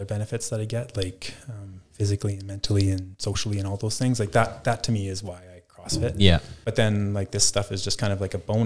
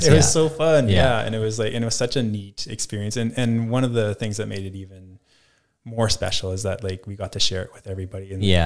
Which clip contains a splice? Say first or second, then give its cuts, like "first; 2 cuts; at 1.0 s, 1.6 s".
first; 1 cut; at 6.5 s